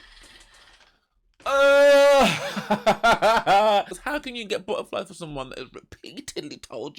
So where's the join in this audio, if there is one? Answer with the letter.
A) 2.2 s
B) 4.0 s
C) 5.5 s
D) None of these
B